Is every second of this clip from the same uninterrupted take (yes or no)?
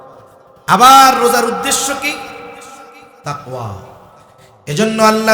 no